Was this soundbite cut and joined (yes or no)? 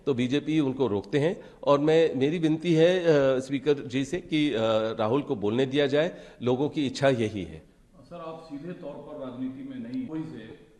no